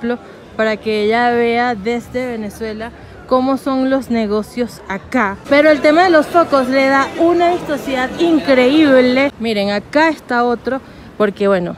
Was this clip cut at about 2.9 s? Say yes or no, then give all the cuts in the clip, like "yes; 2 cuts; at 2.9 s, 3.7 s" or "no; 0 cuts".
no; 2 cuts; at 5.4 s, 9.4 s